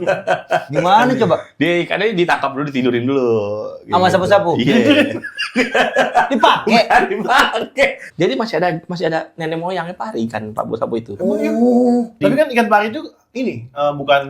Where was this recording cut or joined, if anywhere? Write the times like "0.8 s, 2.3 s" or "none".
8.0 s, 12.1 s